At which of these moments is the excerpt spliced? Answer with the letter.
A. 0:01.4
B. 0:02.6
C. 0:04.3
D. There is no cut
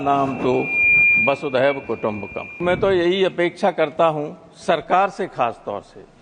B